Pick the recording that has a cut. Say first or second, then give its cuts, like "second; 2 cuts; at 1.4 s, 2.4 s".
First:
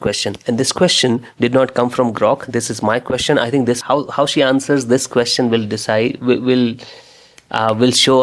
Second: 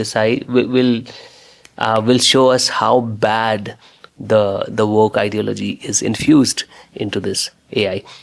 first; 1 cut; at 3.8 s